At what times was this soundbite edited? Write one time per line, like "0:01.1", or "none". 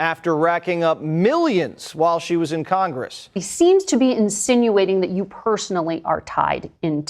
0:03.4

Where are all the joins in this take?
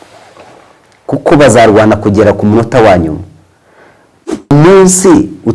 0:04.3

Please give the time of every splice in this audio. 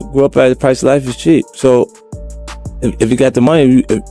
none

